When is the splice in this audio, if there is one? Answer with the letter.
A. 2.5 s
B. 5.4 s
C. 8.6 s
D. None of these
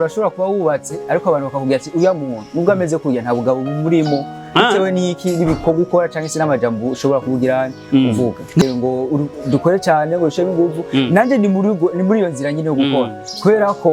C